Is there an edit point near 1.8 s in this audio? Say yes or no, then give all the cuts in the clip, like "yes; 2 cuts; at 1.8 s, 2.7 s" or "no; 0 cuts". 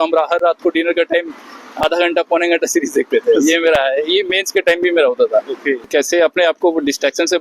no; 1 cut; at 5.7 s